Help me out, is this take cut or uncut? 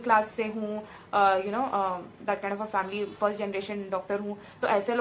uncut